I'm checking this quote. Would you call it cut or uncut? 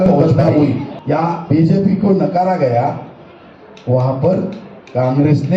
cut